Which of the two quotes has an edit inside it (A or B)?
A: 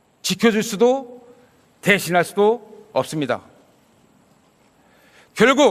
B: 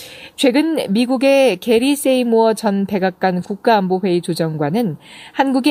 A